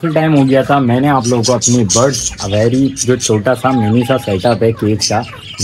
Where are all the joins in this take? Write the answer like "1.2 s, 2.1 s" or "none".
none

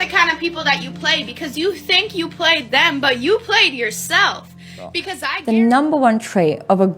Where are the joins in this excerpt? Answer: 5.2 s

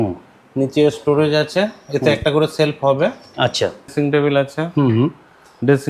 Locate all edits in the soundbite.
3.9 s

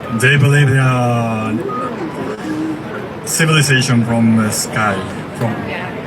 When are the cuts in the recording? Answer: none

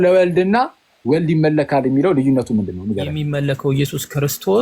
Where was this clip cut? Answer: 3.1 s

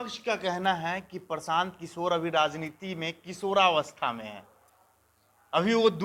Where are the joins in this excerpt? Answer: none

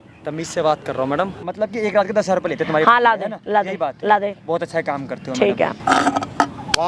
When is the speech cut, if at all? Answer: 1.4 s, 5.8 s

